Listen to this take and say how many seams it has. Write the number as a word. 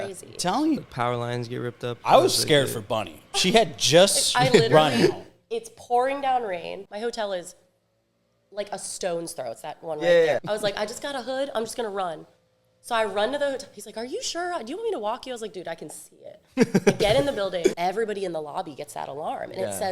four